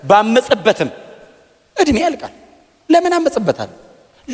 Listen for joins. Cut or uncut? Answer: uncut